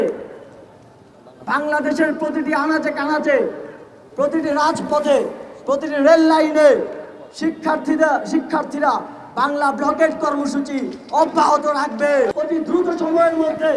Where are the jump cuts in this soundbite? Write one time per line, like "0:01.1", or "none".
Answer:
0:12.3